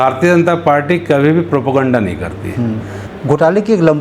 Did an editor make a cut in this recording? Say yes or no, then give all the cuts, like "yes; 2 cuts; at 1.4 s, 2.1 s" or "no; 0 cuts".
yes; 1 cut; at 3.0 s